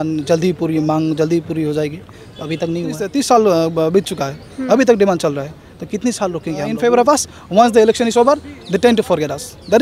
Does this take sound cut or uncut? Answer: cut